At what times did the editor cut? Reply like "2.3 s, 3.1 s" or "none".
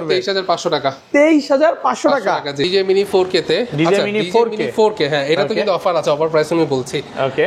2.7 s